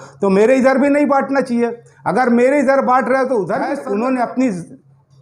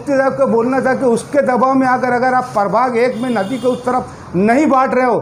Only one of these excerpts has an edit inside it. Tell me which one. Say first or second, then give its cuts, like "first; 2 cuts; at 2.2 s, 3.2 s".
first; 1 cut; at 3.8 s